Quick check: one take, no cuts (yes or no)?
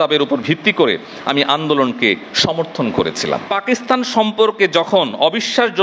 no